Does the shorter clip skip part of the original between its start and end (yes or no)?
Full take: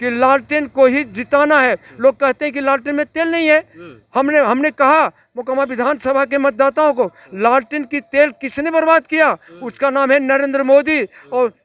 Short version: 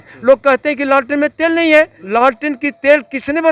yes